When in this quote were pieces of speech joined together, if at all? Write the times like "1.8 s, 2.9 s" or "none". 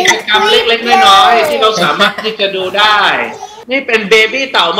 3.5 s